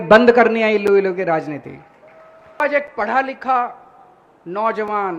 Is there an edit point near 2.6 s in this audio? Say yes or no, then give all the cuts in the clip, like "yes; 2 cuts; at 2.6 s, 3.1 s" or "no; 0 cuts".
yes; 1 cut; at 2.6 s